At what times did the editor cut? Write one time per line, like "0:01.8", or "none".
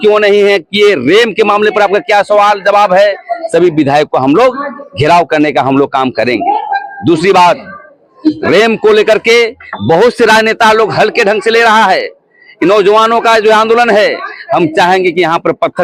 none